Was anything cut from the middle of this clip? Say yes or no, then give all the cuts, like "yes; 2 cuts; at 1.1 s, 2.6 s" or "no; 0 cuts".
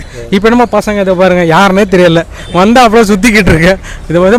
no; 0 cuts